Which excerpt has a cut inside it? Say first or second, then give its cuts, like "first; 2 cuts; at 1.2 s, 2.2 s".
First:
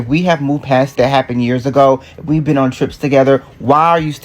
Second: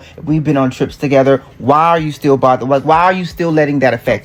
first; 1 cut; at 0.9 s